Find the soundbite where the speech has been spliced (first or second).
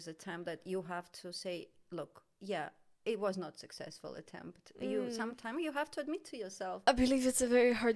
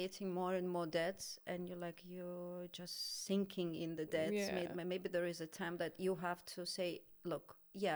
first